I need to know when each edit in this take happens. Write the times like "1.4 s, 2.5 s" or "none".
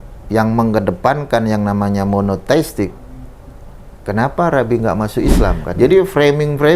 5.6 s